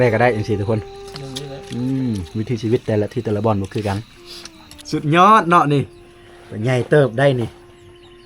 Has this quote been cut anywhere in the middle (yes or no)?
yes